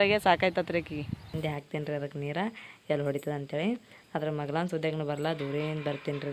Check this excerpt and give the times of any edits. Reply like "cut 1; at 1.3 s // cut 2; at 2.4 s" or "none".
cut 1; at 1.4 s